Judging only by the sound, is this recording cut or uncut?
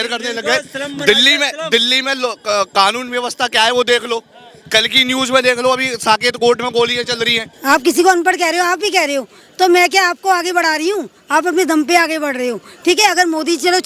cut